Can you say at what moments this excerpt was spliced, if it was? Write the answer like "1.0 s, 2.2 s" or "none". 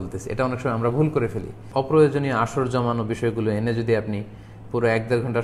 1.6 s